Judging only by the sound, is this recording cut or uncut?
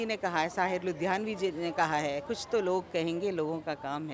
uncut